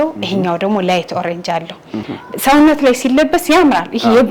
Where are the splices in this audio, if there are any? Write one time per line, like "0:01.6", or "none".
0:02.1